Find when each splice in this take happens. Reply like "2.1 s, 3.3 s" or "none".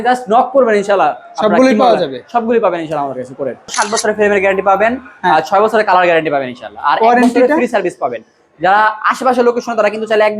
3.8 s